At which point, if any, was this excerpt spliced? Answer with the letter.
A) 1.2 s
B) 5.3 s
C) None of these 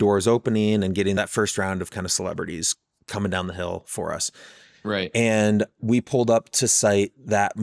A